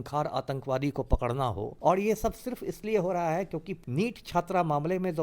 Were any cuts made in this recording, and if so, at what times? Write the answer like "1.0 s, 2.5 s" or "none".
1.7 s, 3.8 s